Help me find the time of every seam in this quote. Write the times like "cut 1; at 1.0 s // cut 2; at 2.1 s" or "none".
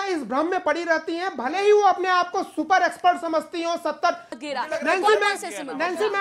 cut 1; at 4.4 s